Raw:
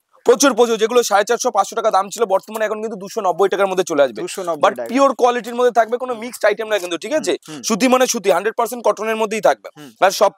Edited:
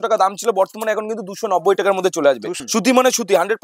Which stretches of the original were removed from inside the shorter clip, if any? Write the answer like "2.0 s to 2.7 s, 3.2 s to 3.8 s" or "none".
4.3 s to 7.5 s

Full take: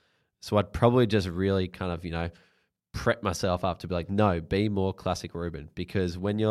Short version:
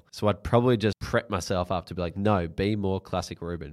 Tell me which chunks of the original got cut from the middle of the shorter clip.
1.3 s to 2.9 s

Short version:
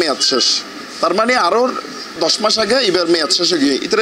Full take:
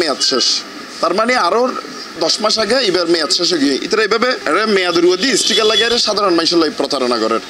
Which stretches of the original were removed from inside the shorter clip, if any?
none

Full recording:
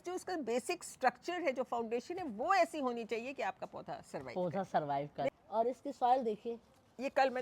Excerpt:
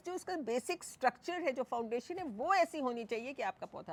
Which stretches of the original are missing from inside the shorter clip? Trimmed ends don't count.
none

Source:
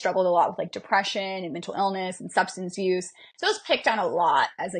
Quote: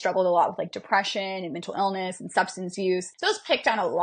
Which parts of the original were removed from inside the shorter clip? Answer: 3.1 s to 3.3 s

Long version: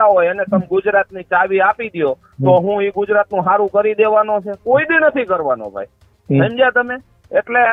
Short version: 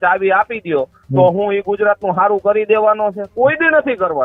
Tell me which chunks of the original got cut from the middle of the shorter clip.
none

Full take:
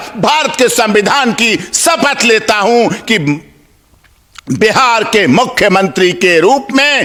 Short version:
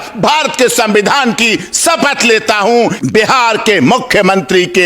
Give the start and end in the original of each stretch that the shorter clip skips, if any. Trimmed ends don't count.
3.0 s to 4.4 s

